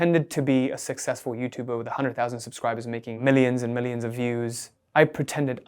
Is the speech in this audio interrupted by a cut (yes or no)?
yes